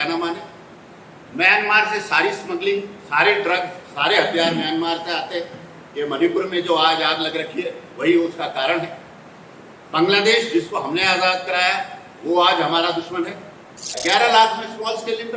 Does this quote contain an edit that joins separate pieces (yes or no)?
yes